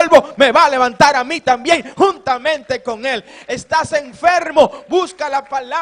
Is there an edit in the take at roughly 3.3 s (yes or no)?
no